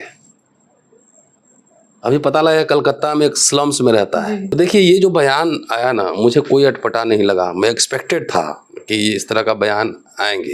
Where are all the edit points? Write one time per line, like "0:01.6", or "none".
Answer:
0:04.5